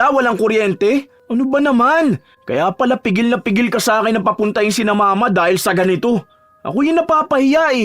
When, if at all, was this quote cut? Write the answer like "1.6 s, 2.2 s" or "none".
1.2 s